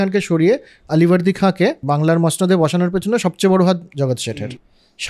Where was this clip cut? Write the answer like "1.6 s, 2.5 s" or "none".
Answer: 1.8 s, 4.3 s